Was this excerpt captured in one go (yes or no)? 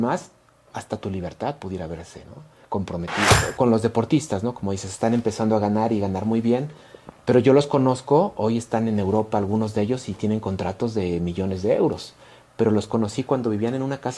no